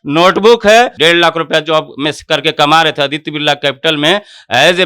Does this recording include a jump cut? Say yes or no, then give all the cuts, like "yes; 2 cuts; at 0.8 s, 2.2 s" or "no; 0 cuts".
yes; 1 cut; at 0.9 s